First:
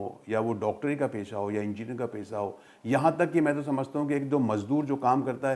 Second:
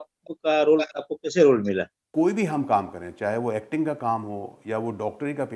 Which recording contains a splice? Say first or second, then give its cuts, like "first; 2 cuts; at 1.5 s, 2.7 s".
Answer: second; 1 cut; at 2.0 s